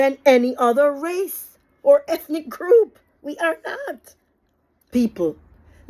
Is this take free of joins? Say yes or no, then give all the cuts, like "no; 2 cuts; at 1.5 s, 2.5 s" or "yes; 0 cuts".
no; 1 cut; at 4.9 s